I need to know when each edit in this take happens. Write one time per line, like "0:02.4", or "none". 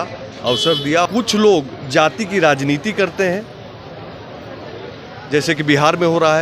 0:01.0

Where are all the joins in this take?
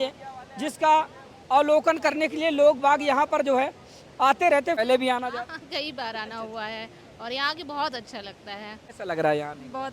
0:04.8
0:08.8

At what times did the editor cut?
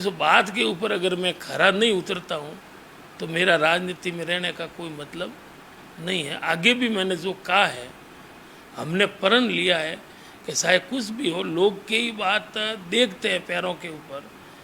0:08.3

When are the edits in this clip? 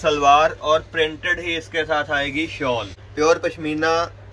0:03.0

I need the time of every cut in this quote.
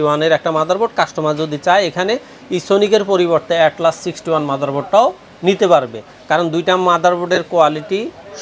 none

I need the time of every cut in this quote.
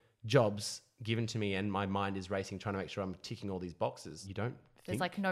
0:04.2

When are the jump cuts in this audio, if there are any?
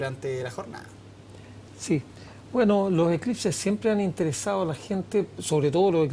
0:05.1

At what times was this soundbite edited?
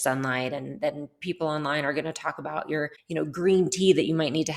0:03.0

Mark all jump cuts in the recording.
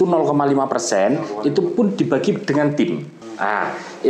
0:03.2

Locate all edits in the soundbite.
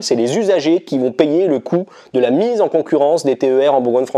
none

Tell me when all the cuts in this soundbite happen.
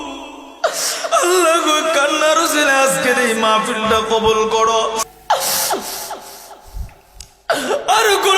0:05.0

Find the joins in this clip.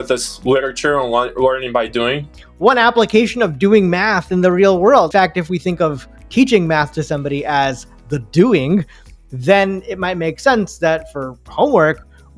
0:02.4
0:05.1

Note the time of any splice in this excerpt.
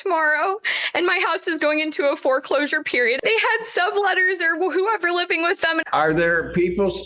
0:03.2
0:05.8

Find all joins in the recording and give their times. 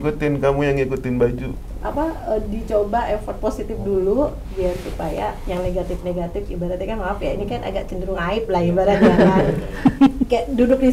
0:01.5

